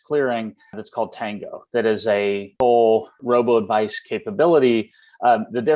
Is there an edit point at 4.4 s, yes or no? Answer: no